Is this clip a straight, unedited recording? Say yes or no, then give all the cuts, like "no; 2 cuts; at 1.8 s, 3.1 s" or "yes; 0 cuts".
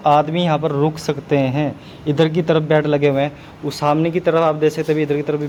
yes; 0 cuts